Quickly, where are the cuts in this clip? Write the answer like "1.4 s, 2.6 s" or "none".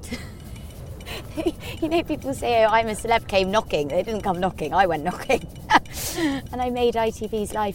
6.4 s